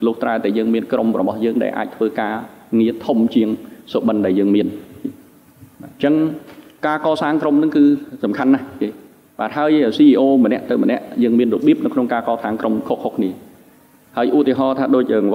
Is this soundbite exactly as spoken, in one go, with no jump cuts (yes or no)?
yes